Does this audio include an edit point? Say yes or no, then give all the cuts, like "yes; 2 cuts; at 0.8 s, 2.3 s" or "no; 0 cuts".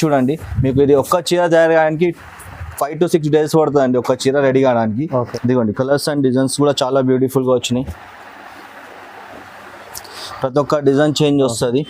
yes; 1 cut; at 5.3 s